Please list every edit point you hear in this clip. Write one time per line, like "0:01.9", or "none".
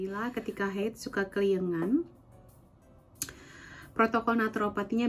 none